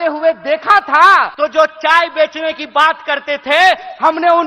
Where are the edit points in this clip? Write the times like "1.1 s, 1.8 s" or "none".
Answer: 1.3 s